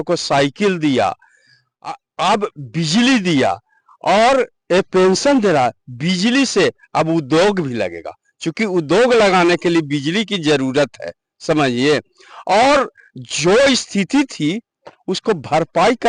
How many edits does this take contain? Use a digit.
0